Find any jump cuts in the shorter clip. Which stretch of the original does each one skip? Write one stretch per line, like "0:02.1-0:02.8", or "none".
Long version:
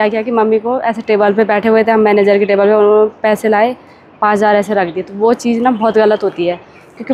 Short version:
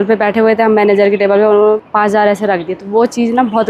0:03.1-0:04.1